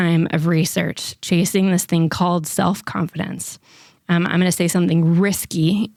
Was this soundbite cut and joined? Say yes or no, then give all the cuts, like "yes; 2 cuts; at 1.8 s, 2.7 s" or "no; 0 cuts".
no; 0 cuts